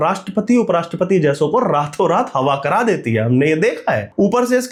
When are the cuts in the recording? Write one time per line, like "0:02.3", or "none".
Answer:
none

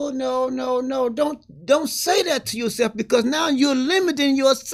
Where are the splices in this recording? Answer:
none

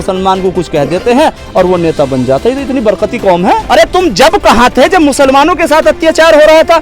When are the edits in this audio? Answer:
0:03.6

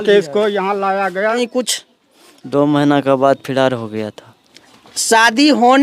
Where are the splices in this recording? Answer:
0:01.4

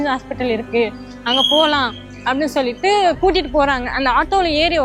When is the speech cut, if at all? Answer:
none

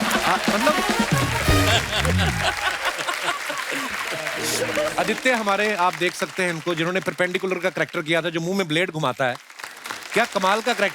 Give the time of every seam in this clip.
0:04.9

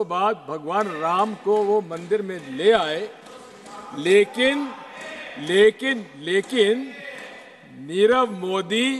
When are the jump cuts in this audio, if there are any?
none

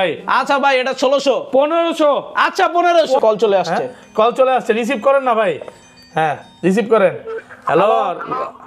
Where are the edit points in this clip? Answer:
0:03.2

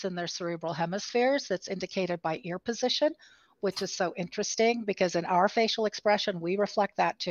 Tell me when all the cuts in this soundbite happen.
none

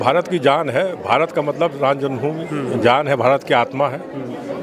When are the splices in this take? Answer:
none

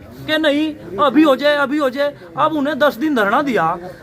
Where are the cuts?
none

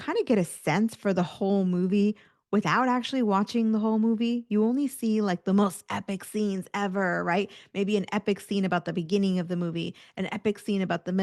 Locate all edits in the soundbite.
none

